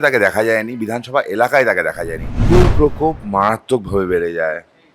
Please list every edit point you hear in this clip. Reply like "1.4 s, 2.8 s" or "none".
2.5 s